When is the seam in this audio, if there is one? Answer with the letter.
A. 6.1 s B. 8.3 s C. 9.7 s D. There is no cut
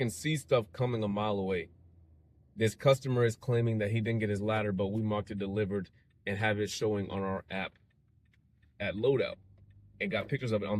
D